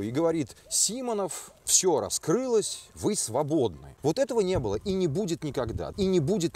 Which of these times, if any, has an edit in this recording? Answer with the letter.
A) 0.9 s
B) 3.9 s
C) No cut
B